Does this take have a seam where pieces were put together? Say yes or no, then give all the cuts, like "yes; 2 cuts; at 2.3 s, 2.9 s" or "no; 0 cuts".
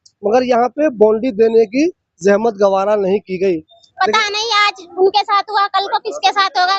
yes; 1 cut; at 3.8 s